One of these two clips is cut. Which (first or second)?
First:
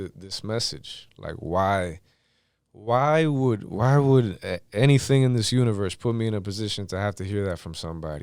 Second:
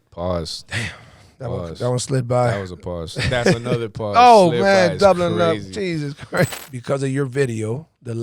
second